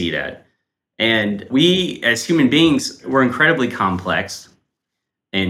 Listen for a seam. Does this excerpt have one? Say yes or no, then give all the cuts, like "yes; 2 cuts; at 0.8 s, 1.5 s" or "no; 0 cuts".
yes; 2 cuts; at 1.5 s, 3.0 s